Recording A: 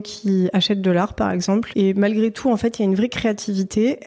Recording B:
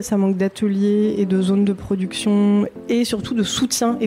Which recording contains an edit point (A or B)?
A